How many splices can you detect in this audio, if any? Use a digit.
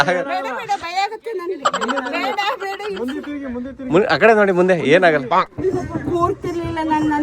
0